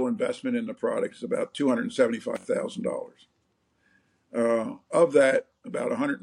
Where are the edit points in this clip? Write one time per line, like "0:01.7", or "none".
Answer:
none